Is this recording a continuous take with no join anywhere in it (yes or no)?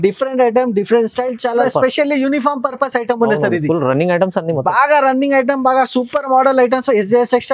no